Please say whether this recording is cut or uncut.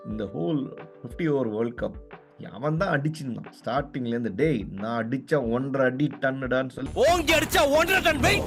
uncut